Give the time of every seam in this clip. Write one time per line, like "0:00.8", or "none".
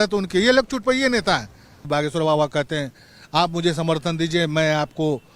0:01.9

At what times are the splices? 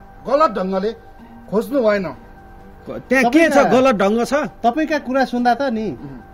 none

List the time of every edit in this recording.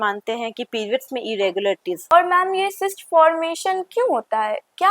0:02.0

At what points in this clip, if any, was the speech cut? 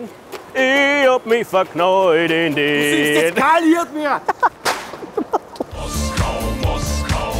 0:05.7

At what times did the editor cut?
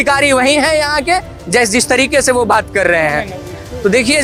none

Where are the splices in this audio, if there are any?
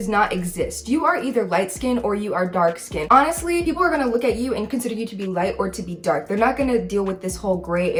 none

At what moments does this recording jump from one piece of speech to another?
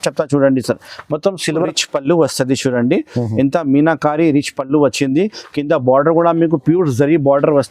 0:01.7

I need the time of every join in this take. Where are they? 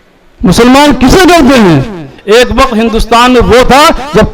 0:02.2

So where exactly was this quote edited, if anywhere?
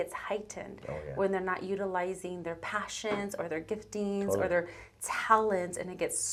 none

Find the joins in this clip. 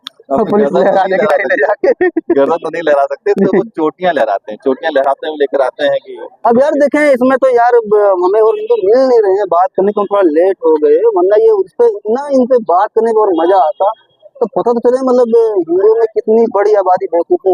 none

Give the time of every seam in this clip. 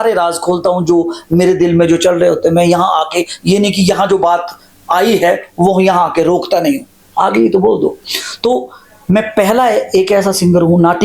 none

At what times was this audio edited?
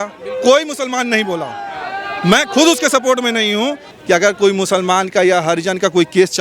0:03.9

